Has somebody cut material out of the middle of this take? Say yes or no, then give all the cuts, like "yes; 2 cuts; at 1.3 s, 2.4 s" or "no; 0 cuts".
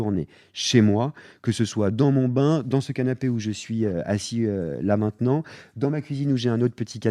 no; 0 cuts